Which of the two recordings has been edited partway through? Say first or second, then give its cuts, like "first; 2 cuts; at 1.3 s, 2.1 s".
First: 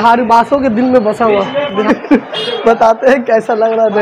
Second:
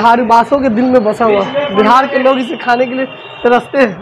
first; 1 cut; at 1.8 s